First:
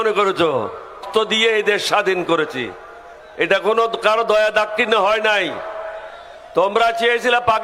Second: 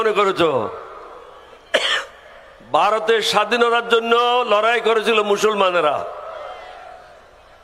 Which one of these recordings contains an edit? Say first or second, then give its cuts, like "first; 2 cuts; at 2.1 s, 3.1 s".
first; 1 cut; at 1.0 s